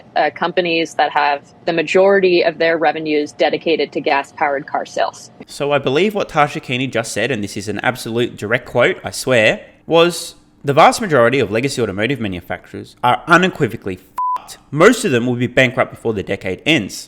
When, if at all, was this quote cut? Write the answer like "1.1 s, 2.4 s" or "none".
none